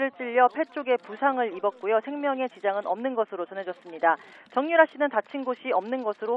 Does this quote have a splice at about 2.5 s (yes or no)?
no